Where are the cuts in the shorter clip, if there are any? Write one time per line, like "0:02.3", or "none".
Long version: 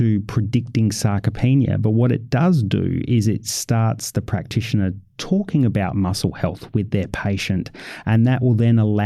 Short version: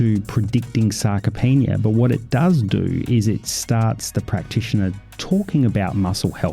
none